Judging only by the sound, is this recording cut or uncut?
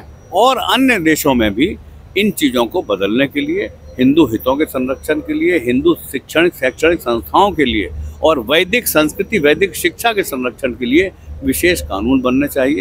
uncut